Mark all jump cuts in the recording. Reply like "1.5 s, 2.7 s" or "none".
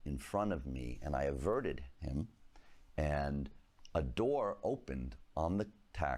none